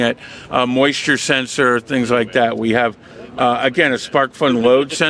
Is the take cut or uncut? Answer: uncut